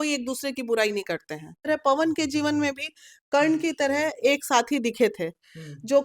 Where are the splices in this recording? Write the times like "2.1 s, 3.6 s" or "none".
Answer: 1.7 s